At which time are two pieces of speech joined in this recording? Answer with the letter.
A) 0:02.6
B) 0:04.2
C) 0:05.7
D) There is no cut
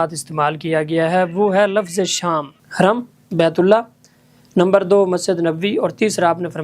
A